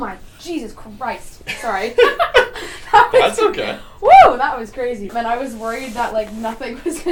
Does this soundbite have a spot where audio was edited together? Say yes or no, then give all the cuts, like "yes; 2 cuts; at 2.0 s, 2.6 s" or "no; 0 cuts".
no; 0 cuts